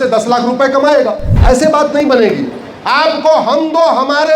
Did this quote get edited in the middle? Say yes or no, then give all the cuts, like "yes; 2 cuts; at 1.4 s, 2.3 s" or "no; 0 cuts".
yes; 1 cut; at 1.3 s